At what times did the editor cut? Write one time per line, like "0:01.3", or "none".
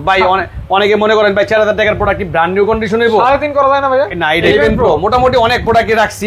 0:04.2